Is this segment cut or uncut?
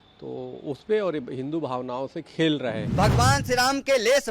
cut